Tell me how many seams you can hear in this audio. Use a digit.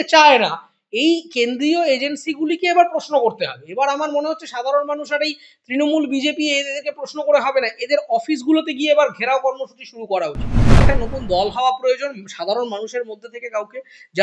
1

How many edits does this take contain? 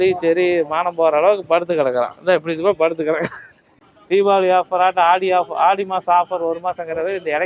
1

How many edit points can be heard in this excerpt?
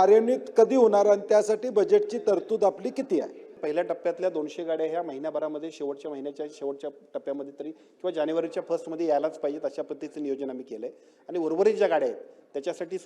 1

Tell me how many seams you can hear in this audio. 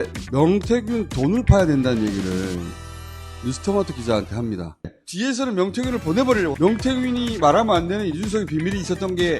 2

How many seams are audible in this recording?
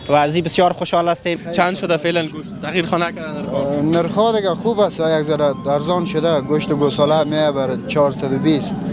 1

